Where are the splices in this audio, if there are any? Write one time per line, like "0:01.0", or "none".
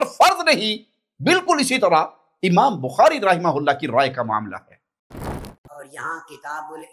0:05.2